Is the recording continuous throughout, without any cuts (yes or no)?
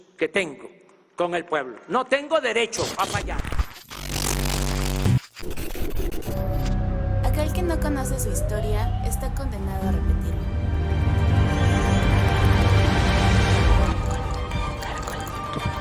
no